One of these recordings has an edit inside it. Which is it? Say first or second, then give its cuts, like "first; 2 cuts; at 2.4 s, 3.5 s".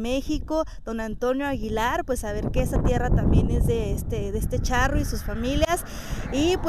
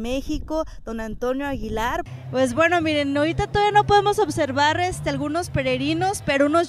second; 1 cut; at 2.1 s